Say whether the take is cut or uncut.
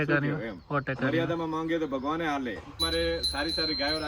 cut